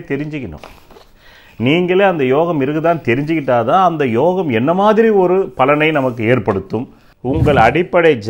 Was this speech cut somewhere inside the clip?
yes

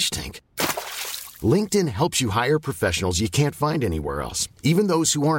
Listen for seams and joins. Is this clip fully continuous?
yes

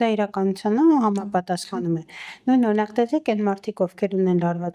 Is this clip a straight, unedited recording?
yes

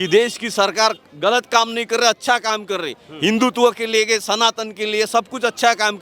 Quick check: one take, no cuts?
yes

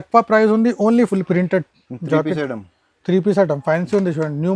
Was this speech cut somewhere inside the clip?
yes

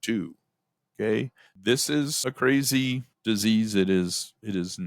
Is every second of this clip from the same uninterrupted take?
no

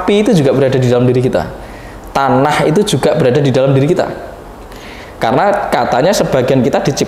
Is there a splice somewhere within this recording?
no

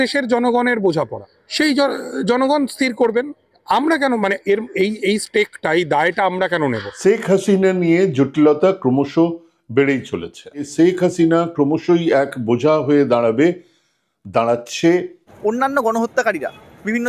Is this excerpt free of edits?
no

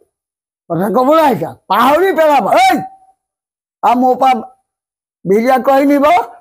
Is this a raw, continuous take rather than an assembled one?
yes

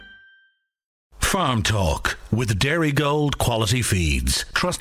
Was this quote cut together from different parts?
yes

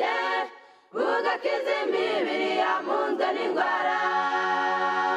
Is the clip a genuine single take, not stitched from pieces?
yes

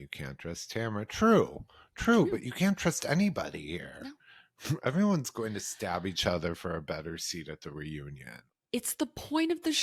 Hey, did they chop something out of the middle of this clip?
no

